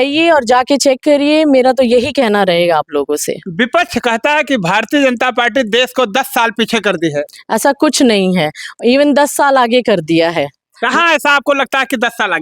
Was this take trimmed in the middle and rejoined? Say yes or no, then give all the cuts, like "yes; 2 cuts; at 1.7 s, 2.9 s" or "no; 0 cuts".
no; 0 cuts